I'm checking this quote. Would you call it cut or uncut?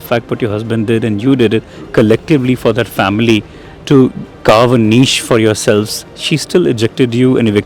uncut